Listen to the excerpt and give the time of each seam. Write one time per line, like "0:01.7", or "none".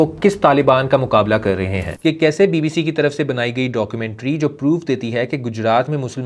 0:01.8